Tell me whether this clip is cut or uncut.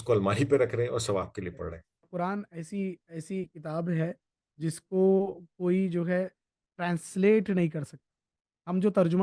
cut